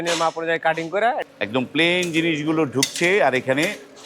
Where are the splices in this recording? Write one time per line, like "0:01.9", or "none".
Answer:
0:01.3

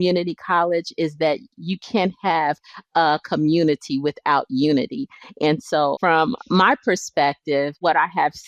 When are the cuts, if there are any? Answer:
0:06.0

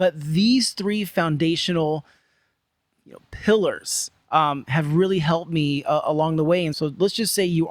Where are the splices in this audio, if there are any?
0:06.7

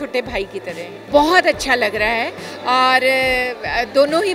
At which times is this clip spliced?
0:00.9

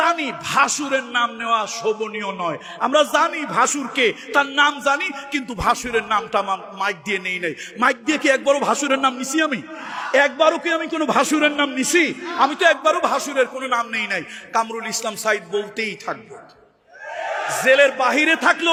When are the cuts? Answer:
none

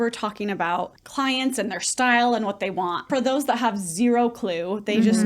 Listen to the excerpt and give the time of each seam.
0:01.0
0:03.1

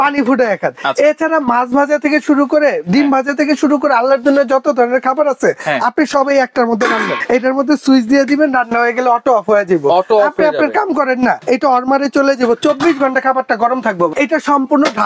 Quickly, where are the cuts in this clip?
0:07.2
0:11.4
0:14.1

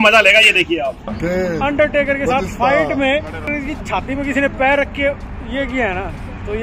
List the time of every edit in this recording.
0:01.2
0:03.5

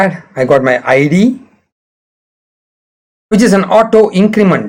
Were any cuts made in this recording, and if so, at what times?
none

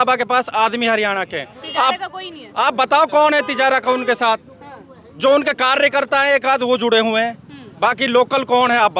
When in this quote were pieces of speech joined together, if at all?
none

